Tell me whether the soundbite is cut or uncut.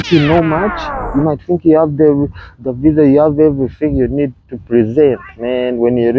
uncut